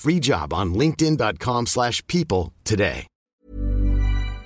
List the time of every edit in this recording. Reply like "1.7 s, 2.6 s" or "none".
3.1 s

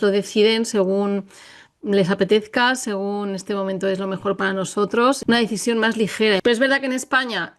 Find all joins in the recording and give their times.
5.2 s, 6.4 s

